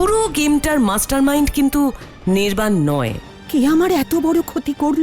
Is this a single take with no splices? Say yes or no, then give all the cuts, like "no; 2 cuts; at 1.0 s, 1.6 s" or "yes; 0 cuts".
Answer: no; 1 cut; at 3.3 s